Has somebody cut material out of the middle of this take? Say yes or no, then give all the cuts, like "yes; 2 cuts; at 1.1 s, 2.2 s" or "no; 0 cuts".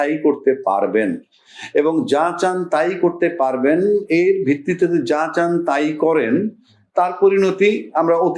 no; 0 cuts